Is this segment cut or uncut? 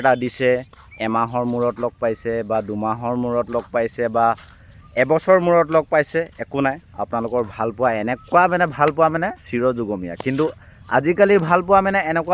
uncut